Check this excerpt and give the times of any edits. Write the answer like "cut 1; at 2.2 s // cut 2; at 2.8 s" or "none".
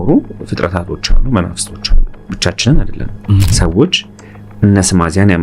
cut 1; at 3.5 s